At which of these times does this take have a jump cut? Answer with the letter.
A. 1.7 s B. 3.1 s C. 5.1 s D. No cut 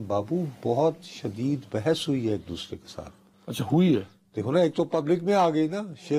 D